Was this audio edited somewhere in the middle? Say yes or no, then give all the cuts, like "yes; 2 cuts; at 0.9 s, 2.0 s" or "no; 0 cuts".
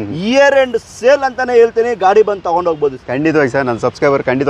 no; 0 cuts